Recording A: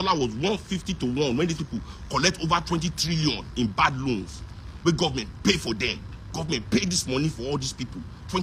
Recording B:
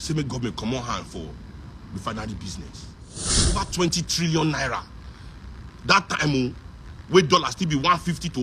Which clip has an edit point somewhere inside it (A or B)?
B